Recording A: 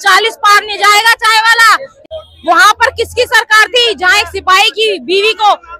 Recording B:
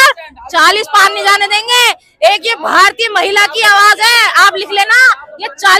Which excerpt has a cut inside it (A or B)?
A